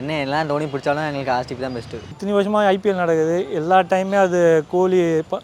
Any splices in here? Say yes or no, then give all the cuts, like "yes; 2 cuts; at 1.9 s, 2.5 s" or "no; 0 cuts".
yes; 1 cut; at 2.1 s